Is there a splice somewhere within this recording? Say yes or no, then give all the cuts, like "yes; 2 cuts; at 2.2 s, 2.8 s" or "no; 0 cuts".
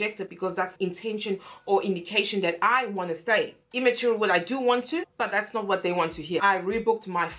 yes; 1 cut; at 6.4 s